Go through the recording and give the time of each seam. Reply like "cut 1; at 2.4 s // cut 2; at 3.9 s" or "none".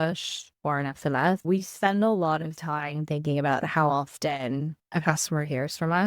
cut 1; at 1.4 s